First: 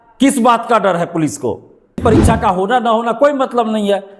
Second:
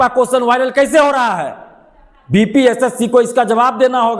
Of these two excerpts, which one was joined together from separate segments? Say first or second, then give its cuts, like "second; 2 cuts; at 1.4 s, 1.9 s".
first; 1 cut; at 2.0 s